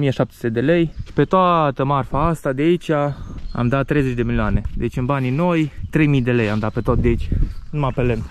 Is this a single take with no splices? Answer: yes; 0 cuts

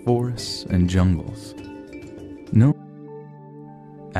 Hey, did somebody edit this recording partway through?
no; 0 cuts

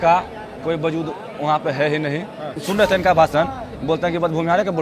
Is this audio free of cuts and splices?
no; 1 cut; at 2.6 s

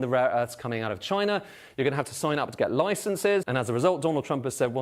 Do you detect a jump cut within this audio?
yes; 1 cut; at 3.5 s

